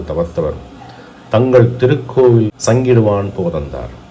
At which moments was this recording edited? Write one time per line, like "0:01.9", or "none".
0:02.6